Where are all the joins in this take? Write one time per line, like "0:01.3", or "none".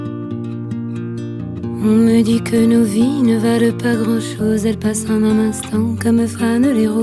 none